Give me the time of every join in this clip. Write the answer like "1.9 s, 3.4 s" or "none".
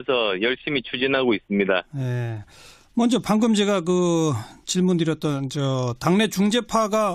3.7 s